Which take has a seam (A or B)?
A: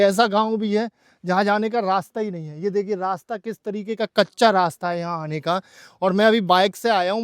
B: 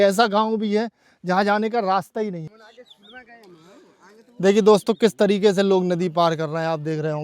B